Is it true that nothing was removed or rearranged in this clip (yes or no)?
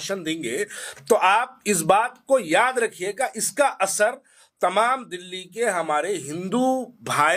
yes